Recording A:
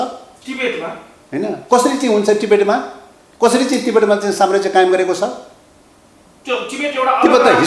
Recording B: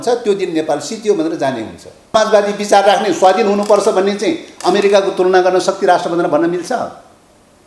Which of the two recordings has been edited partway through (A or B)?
B